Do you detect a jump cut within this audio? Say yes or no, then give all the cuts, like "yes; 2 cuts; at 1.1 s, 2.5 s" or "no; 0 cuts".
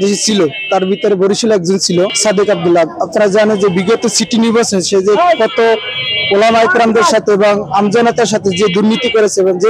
no; 0 cuts